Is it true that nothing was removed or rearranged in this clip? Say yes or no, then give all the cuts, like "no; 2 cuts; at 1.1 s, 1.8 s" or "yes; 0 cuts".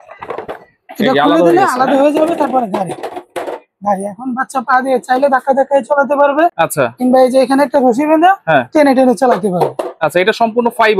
yes; 0 cuts